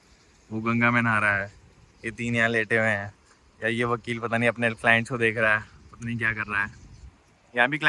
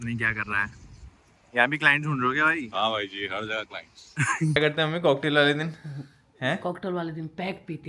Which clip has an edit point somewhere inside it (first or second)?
second